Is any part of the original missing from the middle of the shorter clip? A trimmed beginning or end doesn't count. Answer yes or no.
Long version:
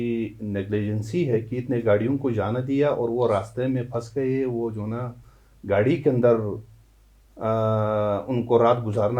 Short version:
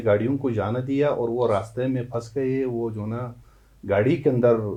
no